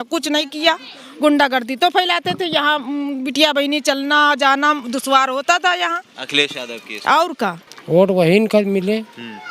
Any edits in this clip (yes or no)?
yes